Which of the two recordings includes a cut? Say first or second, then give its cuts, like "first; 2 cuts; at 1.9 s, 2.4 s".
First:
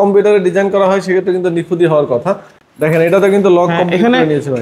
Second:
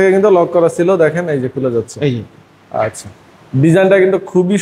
first; 1 cut; at 2.5 s